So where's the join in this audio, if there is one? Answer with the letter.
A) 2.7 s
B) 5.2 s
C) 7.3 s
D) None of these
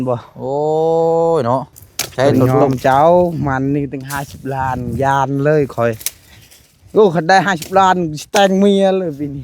A